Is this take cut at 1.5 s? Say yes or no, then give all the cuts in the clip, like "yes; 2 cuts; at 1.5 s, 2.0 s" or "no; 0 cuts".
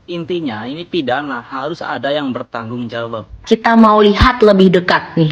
no; 1 cut; at 3.4 s